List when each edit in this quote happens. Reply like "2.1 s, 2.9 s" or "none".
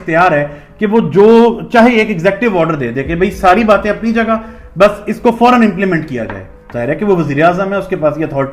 none